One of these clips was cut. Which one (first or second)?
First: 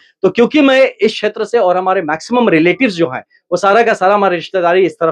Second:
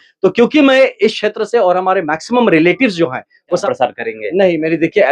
second